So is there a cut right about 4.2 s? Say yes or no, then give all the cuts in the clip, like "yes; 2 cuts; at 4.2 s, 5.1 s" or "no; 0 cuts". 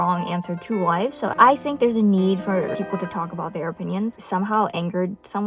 yes; 2 cuts; at 1.3 s, 4.2 s